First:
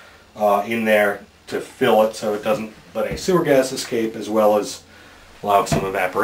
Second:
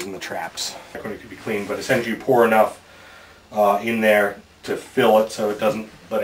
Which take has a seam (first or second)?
second